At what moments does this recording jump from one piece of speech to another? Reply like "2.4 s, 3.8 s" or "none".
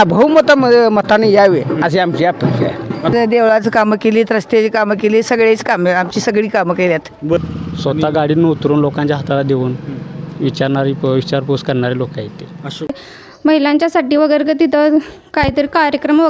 3.1 s, 7.4 s, 12.9 s